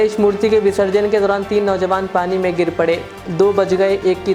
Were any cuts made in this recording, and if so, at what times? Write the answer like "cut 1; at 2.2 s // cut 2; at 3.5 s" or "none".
none